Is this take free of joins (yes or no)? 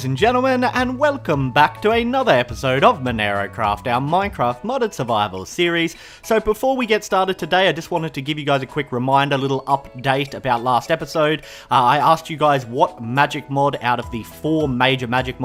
yes